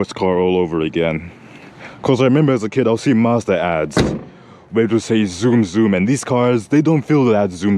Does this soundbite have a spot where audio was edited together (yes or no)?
no